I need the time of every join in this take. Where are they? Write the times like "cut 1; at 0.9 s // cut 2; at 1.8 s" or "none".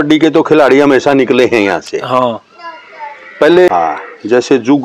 cut 1; at 3.7 s